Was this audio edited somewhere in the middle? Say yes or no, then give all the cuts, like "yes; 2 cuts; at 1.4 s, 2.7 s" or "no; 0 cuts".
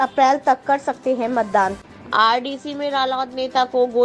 yes; 1 cut; at 1.9 s